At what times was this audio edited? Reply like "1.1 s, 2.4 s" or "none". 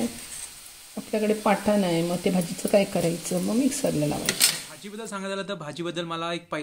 4.8 s